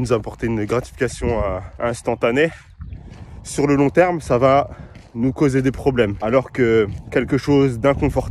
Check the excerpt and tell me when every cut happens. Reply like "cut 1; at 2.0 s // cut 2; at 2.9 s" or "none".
cut 1; at 1.7 s // cut 2; at 6.2 s